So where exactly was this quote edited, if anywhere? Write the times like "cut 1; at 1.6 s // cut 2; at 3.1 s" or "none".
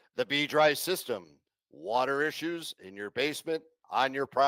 none